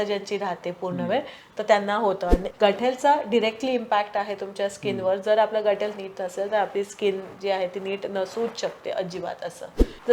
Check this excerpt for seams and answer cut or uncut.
cut